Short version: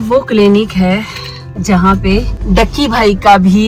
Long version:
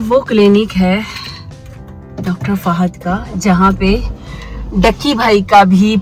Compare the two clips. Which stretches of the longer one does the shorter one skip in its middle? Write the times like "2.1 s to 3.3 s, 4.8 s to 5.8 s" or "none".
1.5 s to 3.3 s, 4.1 s to 4.6 s